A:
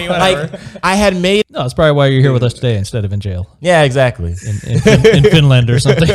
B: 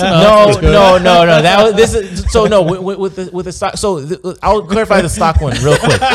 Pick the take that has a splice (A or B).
A